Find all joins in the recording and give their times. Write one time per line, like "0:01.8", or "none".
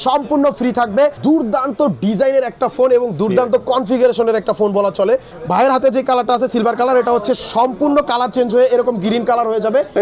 0:01.2
0:05.3